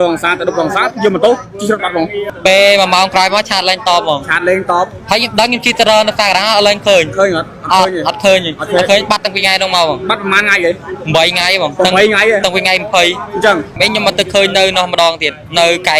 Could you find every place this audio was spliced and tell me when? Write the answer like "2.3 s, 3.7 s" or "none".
2.3 s, 13.7 s